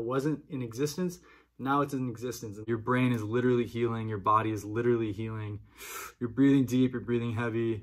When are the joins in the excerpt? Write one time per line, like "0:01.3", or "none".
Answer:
0:02.6